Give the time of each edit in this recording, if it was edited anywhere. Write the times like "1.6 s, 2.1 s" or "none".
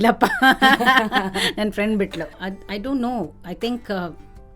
2.4 s